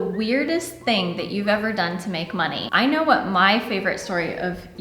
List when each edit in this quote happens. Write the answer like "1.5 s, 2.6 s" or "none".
2.7 s